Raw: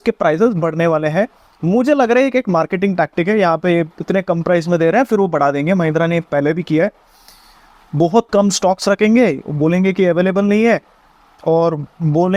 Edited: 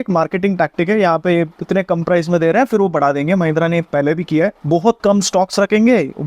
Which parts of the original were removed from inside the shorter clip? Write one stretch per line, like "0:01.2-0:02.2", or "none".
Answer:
0:07.0-0:07.9